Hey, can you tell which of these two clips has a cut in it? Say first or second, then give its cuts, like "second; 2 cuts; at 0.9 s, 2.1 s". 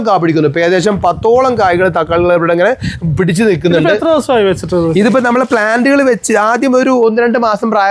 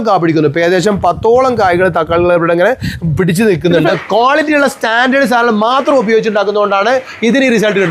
second; 1 cut; at 4.0 s